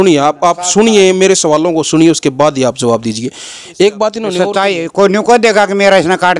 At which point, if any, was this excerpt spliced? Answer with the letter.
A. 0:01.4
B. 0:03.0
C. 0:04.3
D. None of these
C